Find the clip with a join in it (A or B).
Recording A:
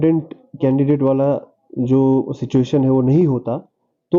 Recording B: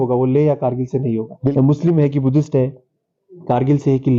B